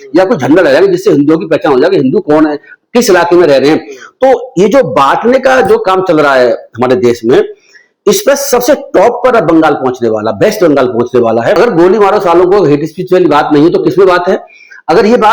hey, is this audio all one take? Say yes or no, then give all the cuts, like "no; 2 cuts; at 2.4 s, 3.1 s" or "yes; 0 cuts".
no; 1 cut; at 11.6 s